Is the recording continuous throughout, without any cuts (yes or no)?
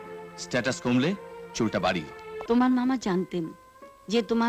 no